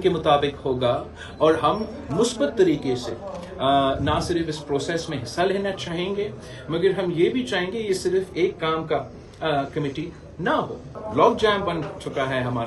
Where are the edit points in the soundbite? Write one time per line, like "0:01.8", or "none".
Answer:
0:11.0